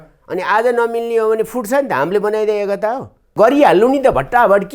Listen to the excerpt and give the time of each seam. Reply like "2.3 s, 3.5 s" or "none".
3.3 s